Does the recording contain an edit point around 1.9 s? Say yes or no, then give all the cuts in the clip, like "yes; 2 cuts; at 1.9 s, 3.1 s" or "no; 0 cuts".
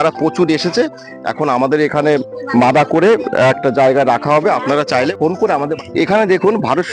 no; 1 cut; at 5.7 s